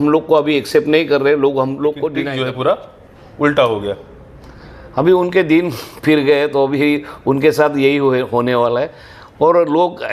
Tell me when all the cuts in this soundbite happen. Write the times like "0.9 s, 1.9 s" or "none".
2.2 s